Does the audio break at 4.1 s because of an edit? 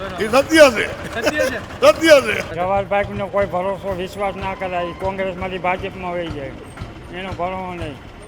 no; 1 cut; at 2.5 s

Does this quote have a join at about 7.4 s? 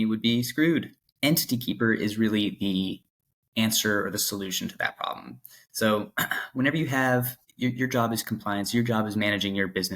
yes; 2 cuts; at 1.0 s, 7.4 s

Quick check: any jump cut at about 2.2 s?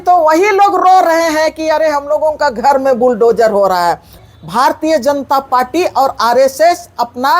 no; 1 cut; at 4.2 s

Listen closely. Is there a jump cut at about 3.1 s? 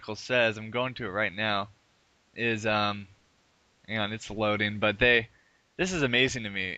no; 1 cut; at 5.3 s

